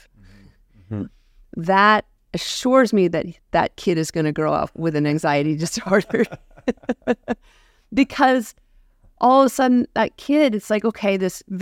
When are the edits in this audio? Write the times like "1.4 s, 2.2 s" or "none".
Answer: none